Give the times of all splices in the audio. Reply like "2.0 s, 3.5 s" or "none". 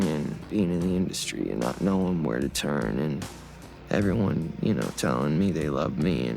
none